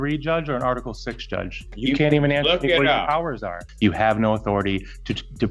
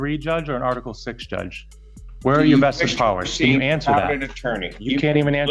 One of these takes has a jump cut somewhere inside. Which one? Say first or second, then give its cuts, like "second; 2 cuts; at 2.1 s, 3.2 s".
first; 2 cuts; at 1.7 s, 3.6 s